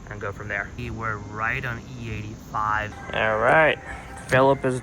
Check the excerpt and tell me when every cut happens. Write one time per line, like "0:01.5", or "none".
0:00.8
0:03.0

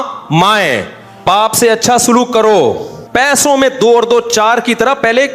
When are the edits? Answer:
0:01.2
0:02.9

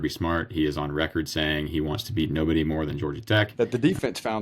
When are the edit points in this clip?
0:03.5

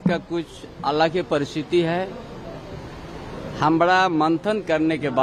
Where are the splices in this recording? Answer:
none

